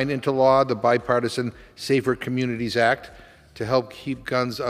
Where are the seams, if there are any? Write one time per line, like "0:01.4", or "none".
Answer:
none